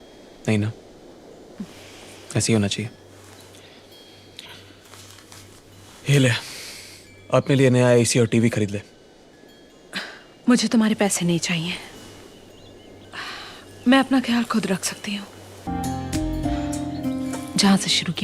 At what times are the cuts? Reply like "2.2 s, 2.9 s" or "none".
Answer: 15.7 s